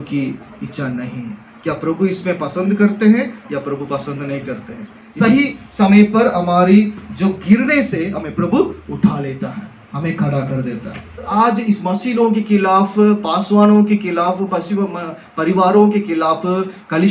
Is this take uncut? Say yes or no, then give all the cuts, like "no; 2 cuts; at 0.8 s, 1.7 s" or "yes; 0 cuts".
no; 2 cuts; at 5.0 s, 11.3 s